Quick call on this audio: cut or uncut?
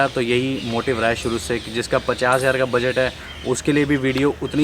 uncut